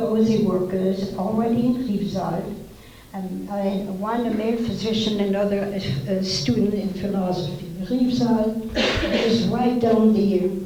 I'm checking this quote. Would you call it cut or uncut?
uncut